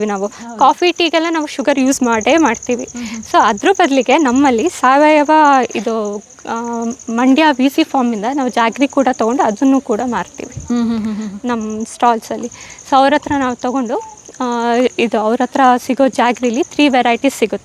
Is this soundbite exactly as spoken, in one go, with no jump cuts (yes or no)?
yes